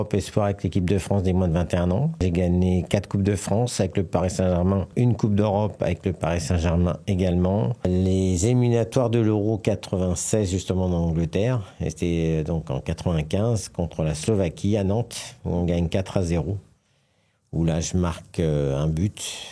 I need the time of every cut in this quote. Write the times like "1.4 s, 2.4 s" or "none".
2.2 s, 4.9 s, 7.8 s

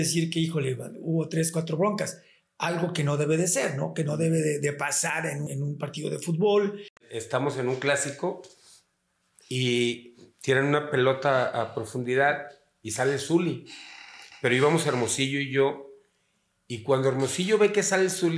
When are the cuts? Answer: 5.5 s, 7.1 s

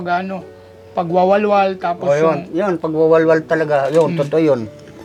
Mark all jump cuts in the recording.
none

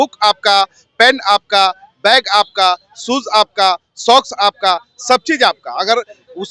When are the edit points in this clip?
none

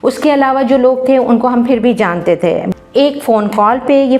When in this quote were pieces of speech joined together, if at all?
2.7 s

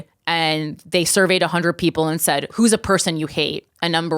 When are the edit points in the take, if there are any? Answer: 2.5 s

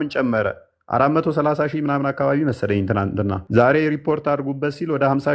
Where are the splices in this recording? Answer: 3.4 s

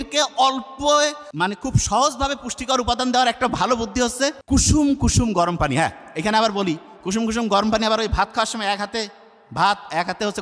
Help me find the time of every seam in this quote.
1.2 s, 4.4 s

